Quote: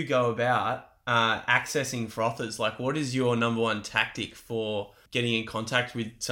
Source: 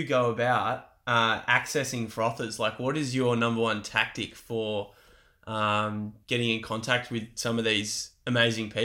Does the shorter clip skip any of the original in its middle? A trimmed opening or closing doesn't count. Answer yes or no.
yes